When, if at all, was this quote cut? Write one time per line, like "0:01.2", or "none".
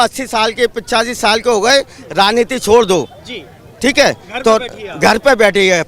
none